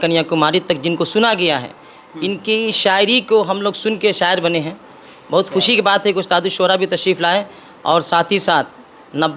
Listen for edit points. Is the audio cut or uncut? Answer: uncut